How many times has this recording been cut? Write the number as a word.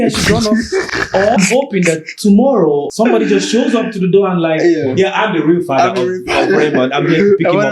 two